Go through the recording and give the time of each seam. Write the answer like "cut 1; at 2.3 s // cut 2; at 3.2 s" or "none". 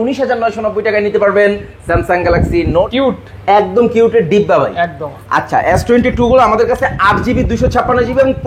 cut 1; at 2.9 s